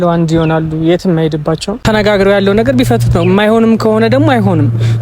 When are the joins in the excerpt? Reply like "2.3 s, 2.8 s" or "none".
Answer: 1.8 s